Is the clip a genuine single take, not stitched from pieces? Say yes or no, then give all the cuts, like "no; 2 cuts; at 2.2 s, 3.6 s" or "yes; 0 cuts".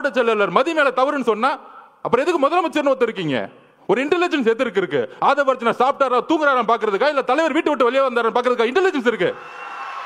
yes; 0 cuts